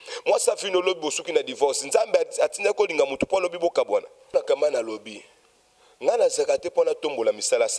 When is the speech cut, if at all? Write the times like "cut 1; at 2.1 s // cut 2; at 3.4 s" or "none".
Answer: cut 1; at 4.3 s